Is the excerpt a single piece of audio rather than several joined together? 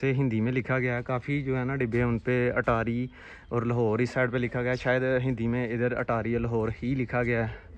yes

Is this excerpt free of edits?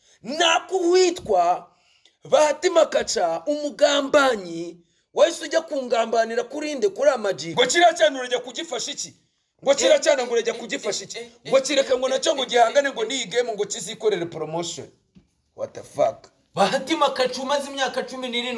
no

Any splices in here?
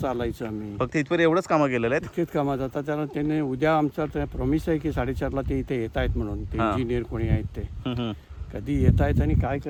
no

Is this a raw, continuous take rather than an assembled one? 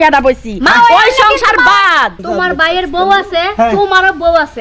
no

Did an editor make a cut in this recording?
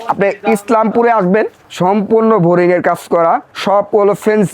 yes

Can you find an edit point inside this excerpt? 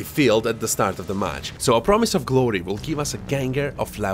yes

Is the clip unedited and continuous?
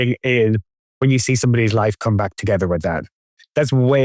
no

